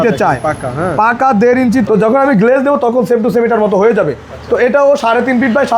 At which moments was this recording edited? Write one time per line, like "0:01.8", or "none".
0:01.9